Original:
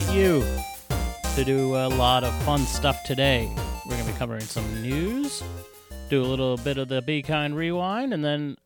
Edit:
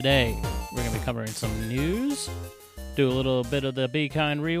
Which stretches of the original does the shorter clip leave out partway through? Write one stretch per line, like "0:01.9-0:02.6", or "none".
none